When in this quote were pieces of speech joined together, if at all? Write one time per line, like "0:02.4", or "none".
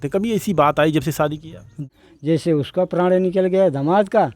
0:01.9